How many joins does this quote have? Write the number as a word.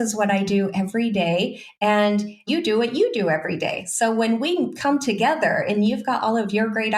one